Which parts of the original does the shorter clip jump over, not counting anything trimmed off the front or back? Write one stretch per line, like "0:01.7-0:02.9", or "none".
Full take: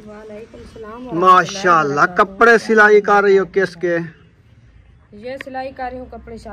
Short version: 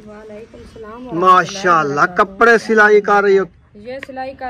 0:03.5-0:04.9